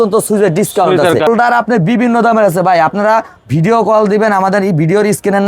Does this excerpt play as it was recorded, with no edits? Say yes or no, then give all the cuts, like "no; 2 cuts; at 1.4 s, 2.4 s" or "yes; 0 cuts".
no; 1 cut; at 1.3 s